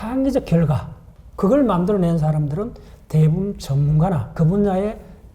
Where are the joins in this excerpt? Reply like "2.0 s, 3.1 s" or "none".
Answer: 4.3 s